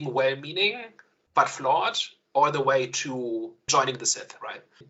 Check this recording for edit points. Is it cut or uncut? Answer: cut